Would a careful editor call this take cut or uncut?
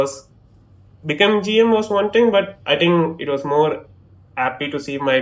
uncut